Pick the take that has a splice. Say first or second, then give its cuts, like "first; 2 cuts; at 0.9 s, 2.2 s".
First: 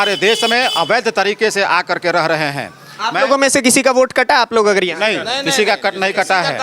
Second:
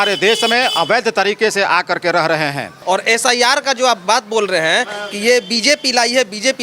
second; 1 cut; at 2.7 s